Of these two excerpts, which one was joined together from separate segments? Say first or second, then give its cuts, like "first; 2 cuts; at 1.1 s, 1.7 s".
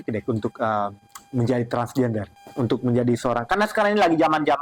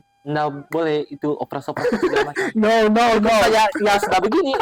first; 1 cut; at 2.4 s